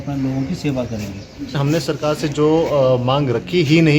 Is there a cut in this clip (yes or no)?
yes